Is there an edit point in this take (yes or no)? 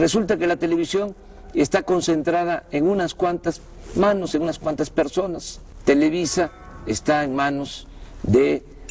no